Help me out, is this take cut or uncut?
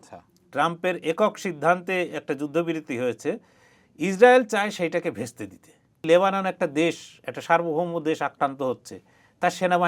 cut